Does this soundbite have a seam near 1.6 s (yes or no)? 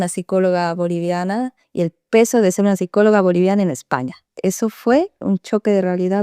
yes